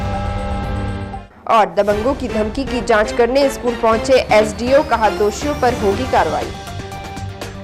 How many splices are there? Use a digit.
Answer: 1